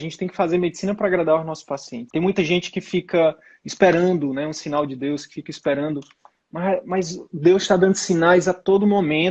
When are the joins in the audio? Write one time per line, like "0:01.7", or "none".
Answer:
0:02.0